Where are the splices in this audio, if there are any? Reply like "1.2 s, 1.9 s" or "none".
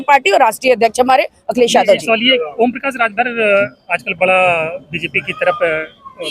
2.3 s